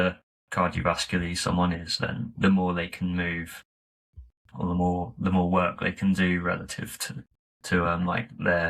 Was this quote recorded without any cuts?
yes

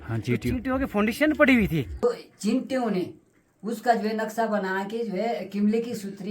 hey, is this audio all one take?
no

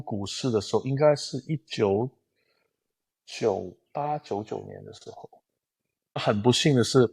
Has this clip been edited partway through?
yes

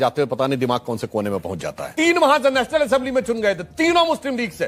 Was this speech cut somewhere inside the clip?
yes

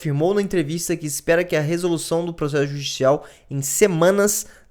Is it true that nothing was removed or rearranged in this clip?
yes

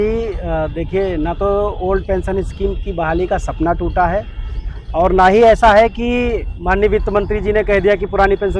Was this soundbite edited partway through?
no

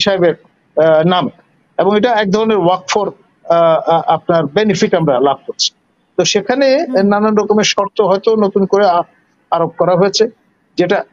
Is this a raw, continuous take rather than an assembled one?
yes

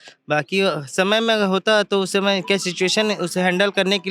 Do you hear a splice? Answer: no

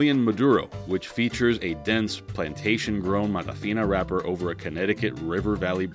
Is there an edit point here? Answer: no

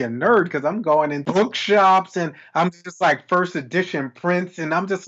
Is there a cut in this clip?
yes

